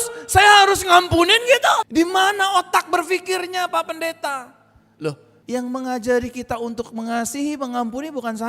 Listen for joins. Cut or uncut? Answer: cut